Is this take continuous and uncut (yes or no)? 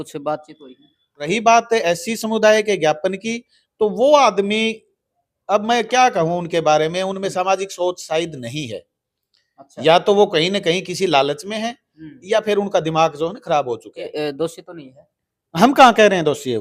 no